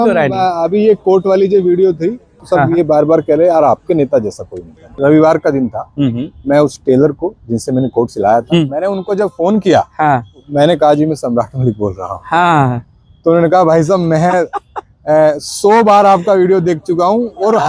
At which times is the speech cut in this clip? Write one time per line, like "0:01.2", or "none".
0:02.4
0:04.9
0:08.7
0:10.5